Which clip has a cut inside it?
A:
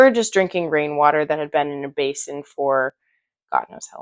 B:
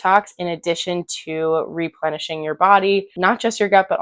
B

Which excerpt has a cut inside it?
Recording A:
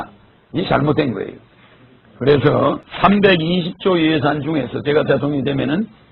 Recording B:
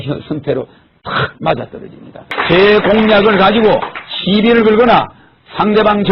B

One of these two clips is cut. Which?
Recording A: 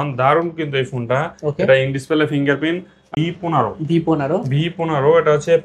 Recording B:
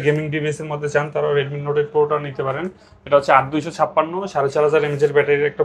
A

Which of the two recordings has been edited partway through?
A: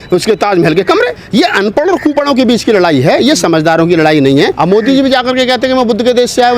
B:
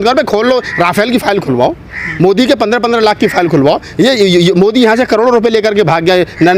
A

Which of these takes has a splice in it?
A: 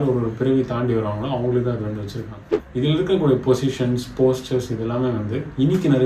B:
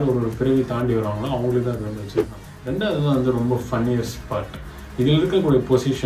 A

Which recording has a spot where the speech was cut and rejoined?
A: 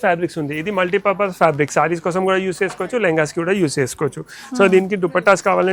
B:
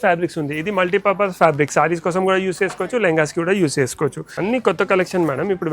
B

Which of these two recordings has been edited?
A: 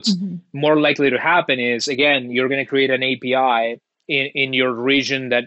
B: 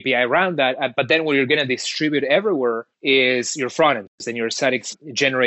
B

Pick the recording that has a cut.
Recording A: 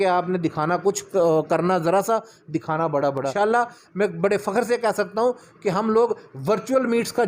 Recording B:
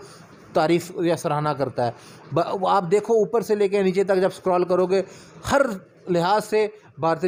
A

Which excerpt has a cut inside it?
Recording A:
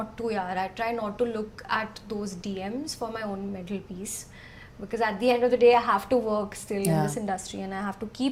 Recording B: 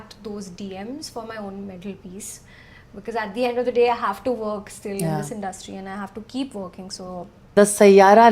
B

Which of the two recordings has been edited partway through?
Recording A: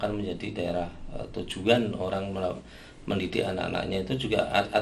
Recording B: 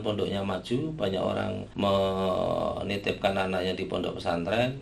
B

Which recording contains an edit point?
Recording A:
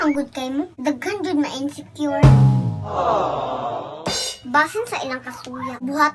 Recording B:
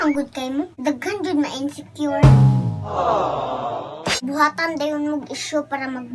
B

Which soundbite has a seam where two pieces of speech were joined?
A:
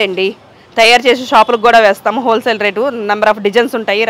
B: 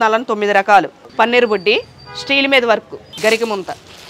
B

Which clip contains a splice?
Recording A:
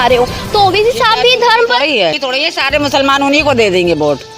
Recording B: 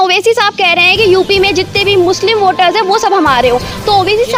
A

